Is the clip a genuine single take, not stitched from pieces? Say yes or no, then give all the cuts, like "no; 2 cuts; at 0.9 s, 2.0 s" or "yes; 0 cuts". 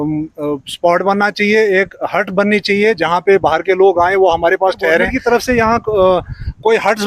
no; 1 cut; at 5.1 s